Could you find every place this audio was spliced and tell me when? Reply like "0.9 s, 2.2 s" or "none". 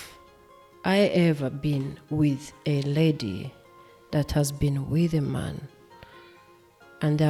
none